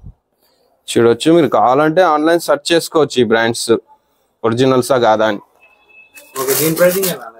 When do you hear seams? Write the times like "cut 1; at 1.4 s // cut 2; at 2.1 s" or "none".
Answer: none